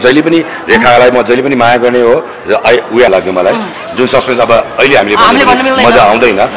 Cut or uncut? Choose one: cut